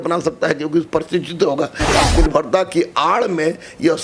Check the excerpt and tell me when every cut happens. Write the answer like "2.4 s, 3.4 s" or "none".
1.8 s